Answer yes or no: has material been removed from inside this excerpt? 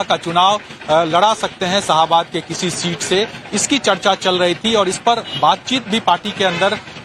no